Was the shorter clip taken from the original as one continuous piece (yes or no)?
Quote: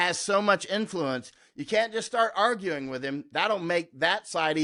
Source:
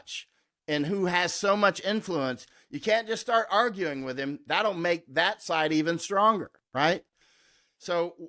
yes